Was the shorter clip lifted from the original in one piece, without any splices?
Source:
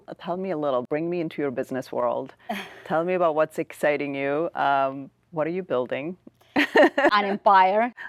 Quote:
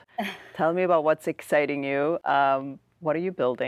yes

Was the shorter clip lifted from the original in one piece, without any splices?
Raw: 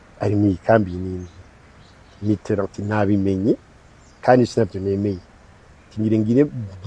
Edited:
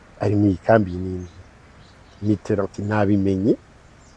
yes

